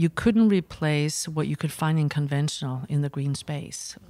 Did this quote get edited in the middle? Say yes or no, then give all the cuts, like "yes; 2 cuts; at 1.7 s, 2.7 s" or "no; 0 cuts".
no; 0 cuts